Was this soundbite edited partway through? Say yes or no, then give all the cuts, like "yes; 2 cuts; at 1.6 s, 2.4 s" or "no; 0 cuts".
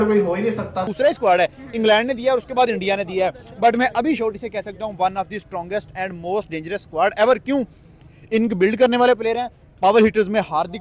yes; 1 cut; at 0.9 s